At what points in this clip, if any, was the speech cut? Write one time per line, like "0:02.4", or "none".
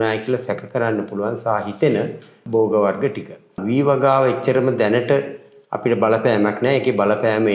0:02.4
0:03.6